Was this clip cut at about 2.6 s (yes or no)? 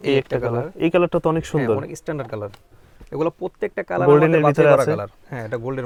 no